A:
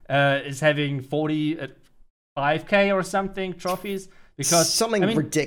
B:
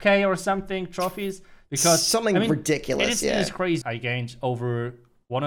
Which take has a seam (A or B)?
B